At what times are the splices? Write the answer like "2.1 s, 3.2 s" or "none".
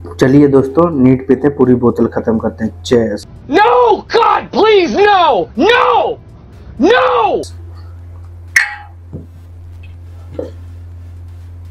none